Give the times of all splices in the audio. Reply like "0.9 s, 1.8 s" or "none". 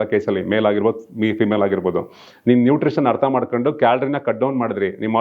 none